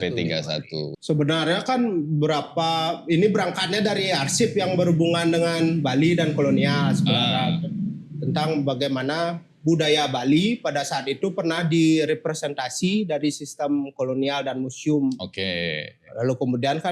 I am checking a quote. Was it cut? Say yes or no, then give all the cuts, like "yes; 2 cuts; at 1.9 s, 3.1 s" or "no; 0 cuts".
yes; 1 cut; at 0.9 s